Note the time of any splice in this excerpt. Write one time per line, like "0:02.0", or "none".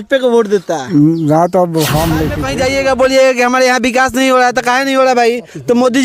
0:02.4